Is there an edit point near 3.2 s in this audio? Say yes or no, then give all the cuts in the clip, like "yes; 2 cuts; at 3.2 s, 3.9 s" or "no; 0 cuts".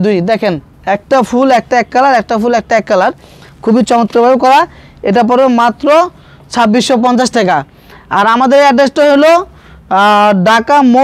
no; 0 cuts